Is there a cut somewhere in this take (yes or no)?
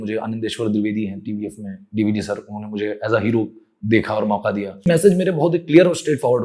yes